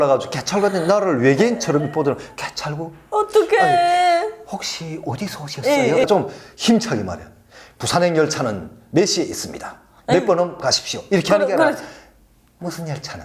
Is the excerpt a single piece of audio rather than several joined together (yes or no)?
no